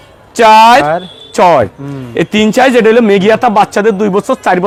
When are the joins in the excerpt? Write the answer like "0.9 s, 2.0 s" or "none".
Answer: none